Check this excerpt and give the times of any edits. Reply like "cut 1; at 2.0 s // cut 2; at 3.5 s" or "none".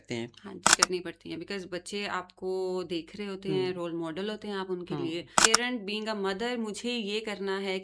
cut 1; at 0.7 s // cut 2; at 5.5 s